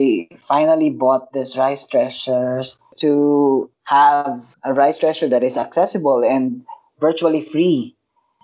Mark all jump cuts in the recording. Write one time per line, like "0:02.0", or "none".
0:02.9
0:04.0